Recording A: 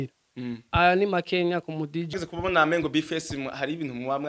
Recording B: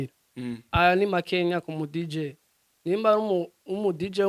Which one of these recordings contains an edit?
A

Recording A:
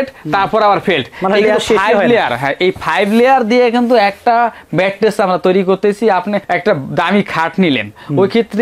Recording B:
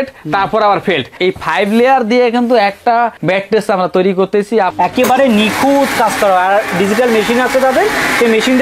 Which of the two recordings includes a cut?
B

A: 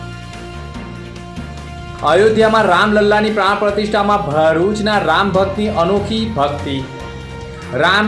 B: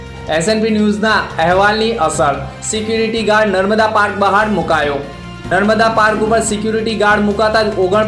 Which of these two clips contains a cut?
A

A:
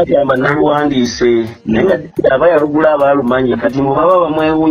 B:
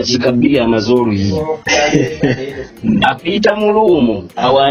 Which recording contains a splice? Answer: B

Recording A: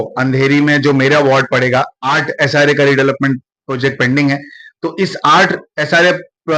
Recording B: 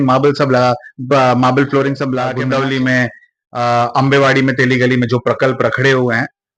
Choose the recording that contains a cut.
B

